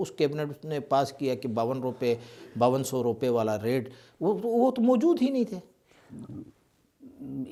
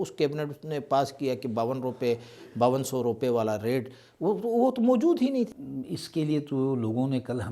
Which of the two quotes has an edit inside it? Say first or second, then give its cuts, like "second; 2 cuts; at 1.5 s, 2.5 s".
second; 1 cut; at 5.6 s